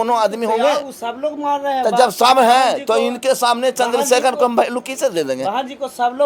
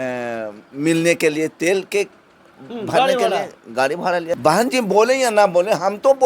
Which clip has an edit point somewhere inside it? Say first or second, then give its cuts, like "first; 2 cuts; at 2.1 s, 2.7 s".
second; 1 cut; at 4.4 s